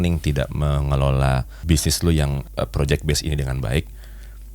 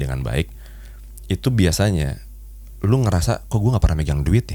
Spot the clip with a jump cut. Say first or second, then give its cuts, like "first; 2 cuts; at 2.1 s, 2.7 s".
first; 2 cuts; at 1.6 s, 2.4 s